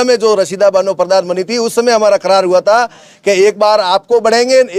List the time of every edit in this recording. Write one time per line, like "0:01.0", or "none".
none